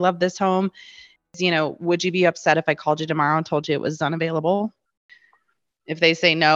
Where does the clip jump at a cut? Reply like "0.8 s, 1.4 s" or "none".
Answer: 1.3 s, 5.0 s